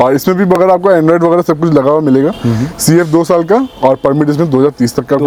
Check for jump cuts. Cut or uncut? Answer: uncut